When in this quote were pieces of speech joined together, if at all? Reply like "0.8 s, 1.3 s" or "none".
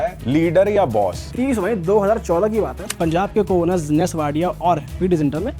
1.2 s, 2.9 s